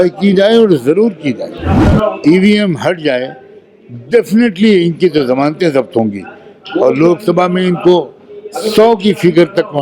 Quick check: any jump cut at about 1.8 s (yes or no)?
yes